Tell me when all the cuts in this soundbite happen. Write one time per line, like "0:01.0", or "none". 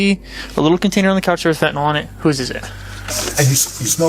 0:03.1